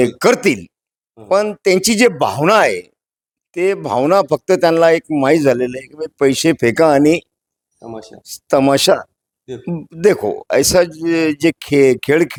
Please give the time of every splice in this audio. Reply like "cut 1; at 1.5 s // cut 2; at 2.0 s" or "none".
none